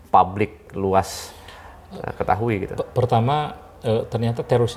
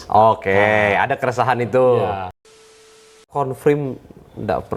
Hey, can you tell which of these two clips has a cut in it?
second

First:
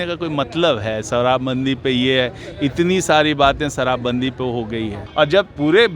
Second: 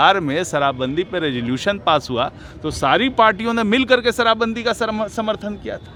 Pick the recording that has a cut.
first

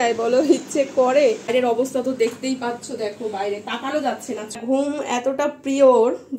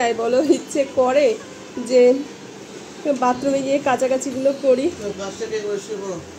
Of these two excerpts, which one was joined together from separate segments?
first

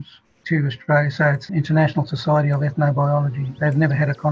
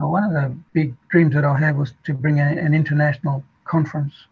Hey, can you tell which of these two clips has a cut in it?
first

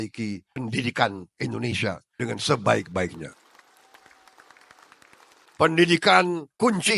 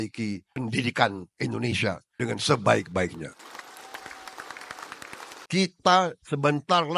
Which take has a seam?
second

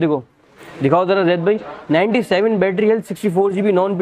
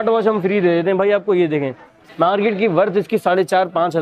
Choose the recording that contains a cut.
second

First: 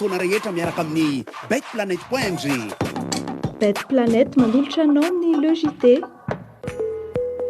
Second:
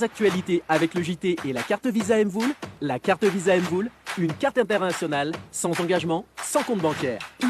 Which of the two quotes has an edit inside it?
first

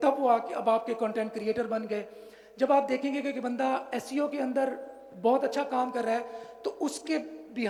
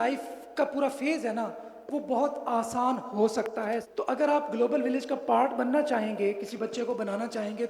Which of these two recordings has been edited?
second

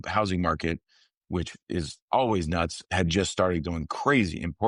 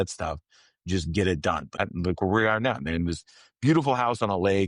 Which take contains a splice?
second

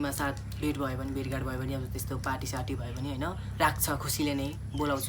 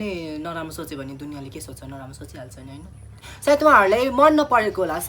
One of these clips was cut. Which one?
second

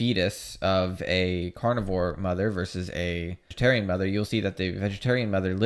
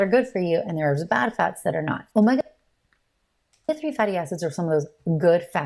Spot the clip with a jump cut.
first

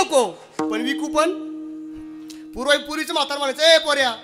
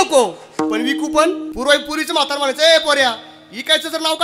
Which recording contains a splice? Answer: second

